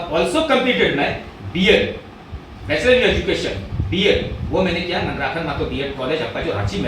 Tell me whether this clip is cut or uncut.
uncut